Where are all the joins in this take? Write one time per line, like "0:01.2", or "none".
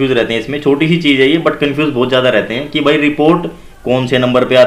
none